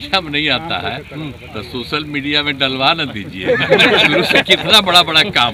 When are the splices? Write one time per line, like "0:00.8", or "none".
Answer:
none